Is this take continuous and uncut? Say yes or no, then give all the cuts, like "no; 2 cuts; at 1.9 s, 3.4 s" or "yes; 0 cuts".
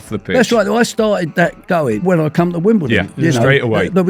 no; 1 cut; at 2.0 s